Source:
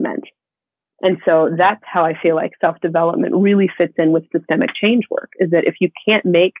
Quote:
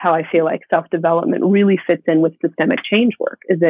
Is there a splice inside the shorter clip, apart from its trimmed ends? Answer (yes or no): no